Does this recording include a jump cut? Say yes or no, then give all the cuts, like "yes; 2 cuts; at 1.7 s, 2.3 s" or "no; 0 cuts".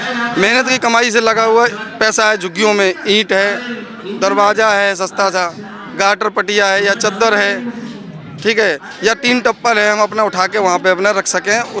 no; 0 cuts